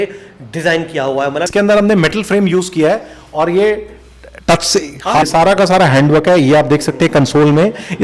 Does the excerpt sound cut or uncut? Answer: cut